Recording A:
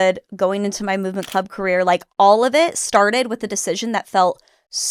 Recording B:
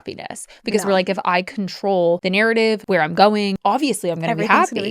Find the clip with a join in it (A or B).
B